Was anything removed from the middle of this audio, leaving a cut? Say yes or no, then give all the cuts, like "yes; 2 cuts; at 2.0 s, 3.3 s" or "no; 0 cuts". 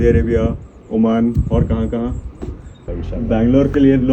yes; 1 cut; at 2.9 s